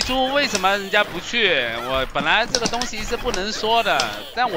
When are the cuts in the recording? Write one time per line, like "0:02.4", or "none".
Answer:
none